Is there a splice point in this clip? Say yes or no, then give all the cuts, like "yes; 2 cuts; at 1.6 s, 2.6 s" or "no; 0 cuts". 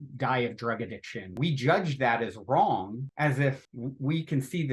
yes; 3 cuts; at 1.4 s, 3.0 s, 3.7 s